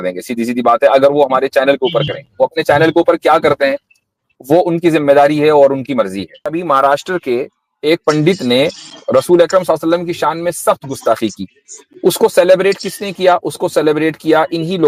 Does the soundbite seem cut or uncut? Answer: cut